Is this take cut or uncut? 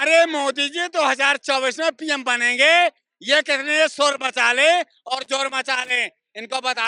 uncut